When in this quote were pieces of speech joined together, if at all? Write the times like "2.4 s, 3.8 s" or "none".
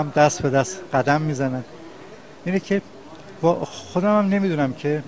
4.1 s